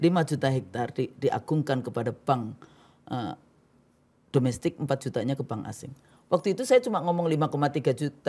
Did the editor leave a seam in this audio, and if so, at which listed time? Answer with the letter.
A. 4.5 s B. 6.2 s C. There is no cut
C